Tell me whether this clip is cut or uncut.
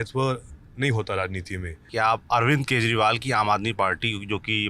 cut